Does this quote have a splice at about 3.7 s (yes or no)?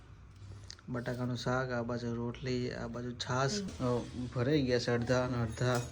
yes